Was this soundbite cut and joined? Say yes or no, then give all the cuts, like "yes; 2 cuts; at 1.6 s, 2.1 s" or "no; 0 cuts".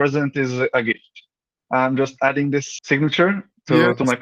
yes; 1 cut; at 1.5 s